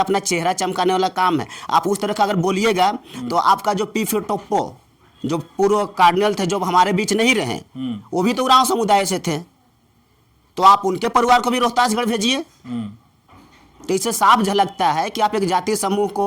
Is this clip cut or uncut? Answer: uncut